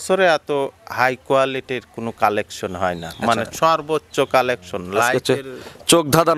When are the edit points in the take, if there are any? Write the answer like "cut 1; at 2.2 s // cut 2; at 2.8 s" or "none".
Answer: none